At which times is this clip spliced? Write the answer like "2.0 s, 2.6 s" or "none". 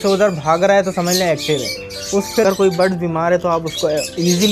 2.4 s